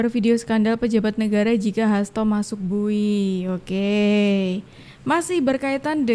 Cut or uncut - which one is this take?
uncut